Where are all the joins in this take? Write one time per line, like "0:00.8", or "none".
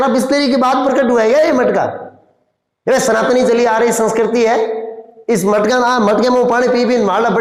none